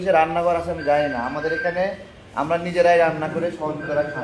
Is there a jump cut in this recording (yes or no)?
no